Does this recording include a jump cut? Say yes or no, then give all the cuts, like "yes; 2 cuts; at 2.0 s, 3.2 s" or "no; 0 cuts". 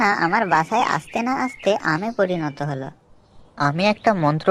no; 0 cuts